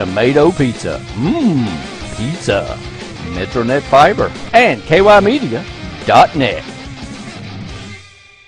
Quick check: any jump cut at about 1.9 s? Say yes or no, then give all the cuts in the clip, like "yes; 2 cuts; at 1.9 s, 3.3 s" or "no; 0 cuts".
no; 1 cut; at 4.4 s